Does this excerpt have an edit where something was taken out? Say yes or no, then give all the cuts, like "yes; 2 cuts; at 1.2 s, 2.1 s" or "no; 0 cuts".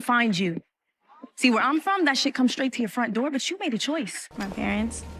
yes; 1 cut; at 4.1 s